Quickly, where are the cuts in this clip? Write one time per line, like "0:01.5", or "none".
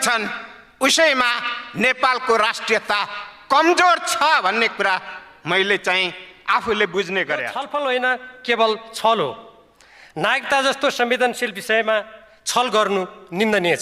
0:07.6